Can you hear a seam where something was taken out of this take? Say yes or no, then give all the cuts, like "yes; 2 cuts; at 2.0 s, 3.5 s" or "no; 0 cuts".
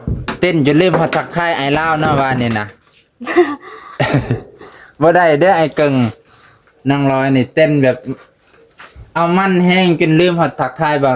no; 0 cuts